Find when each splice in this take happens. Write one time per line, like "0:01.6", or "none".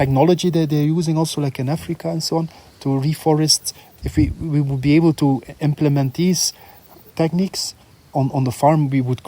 0:03.9